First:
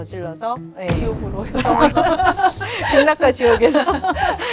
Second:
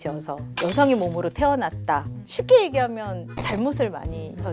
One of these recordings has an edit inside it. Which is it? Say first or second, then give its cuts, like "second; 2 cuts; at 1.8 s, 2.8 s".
second; 1 cut; at 1.9 s